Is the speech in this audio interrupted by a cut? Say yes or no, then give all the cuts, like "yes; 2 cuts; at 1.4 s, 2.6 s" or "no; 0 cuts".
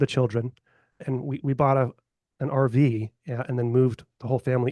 yes; 1 cut; at 1.0 s